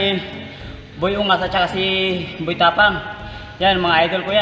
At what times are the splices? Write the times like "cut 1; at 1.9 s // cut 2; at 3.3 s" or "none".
none